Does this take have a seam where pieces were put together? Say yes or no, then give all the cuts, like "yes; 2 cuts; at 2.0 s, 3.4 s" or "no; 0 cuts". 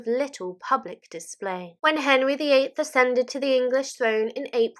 yes; 1 cut; at 1.7 s